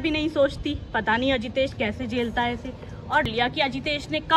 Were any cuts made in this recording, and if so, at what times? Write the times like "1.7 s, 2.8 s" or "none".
3.3 s